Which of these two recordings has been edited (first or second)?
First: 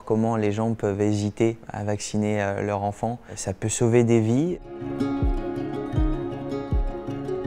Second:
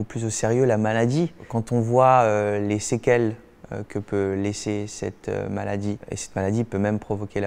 first